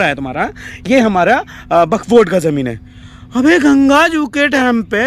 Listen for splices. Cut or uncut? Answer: uncut